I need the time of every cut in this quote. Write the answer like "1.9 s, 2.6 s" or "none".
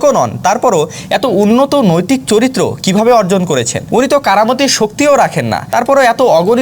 3.8 s, 5.6 s

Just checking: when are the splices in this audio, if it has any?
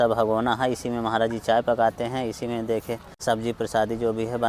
3.1 s

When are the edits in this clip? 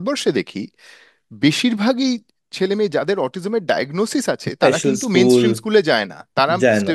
none

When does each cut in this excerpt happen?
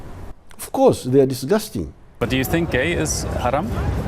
2.1 s

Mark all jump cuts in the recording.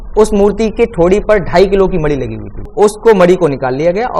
2.6 s

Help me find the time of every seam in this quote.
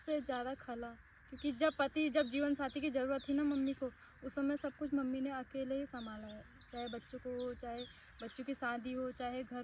none

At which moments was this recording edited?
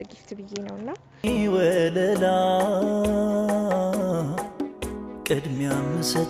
1.2 s

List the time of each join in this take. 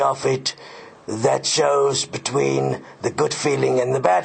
3.1 s

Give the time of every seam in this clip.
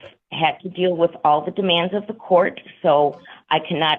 none

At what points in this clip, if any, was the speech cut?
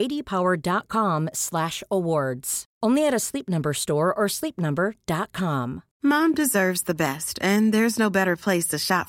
5.9 s

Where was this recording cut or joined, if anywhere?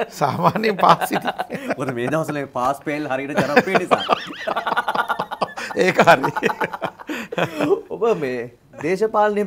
none

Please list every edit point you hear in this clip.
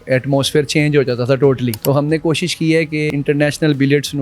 1.8 s, 3.1 s

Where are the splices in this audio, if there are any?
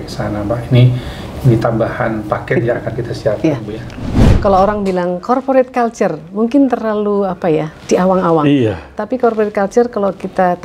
4.1 s

